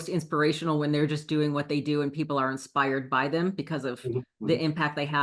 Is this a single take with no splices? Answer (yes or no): yes